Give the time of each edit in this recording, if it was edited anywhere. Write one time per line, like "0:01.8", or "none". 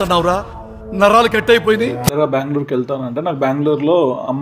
0:02.1